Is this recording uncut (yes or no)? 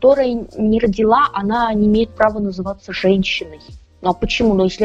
yes